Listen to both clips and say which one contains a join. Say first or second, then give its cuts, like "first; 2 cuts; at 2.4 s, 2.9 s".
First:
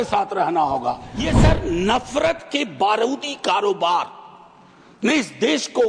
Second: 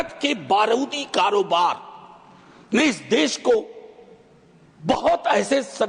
first; 1 cut; at 1.1 s